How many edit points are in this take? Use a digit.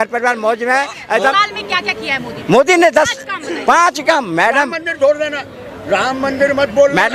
1